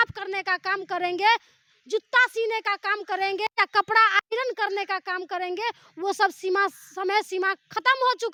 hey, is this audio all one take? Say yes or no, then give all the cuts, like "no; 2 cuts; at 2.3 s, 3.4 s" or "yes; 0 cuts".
yes; 0 cuts